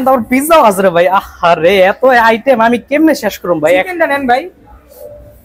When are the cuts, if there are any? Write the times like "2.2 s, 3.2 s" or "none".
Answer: none